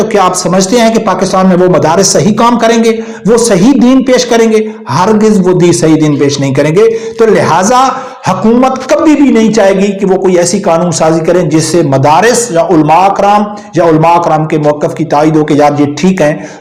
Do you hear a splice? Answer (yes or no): no